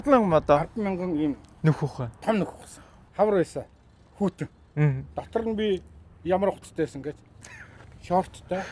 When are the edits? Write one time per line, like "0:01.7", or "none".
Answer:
0:03.0